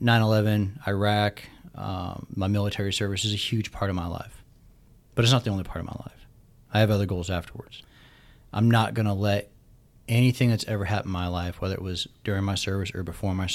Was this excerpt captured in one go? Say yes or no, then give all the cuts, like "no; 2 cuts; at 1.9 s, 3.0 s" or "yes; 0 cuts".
no; 1 cut; at 7.8 s